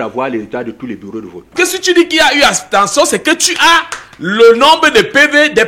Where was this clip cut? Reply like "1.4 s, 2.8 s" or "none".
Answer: 1.5 s